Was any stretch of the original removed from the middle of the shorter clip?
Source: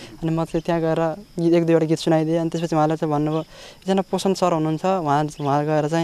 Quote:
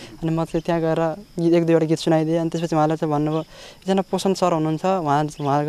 no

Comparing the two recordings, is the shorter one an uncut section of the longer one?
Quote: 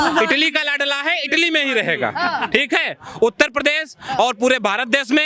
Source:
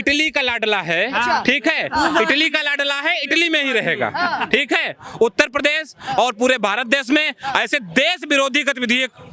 yes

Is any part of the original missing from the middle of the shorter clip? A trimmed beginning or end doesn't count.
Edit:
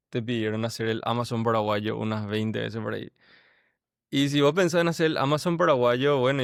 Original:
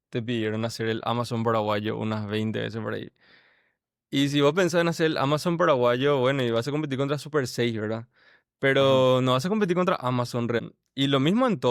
no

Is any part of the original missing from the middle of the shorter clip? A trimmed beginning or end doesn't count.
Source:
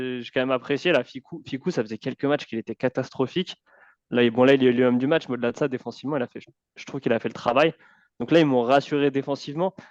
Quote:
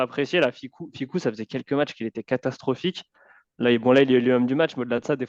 no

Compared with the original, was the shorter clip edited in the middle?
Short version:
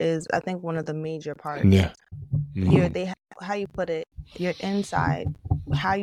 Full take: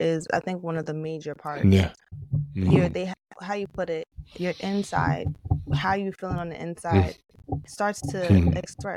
no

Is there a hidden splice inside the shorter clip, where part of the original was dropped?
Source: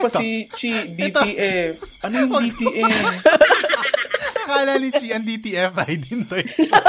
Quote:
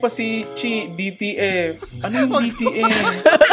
no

